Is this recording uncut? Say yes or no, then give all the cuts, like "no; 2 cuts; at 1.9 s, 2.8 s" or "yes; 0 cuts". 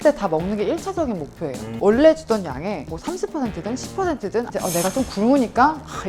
no; 2 cuts; at 1.7 s, 4.5 s